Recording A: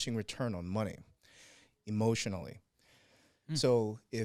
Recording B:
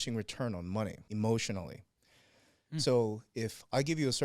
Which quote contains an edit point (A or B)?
B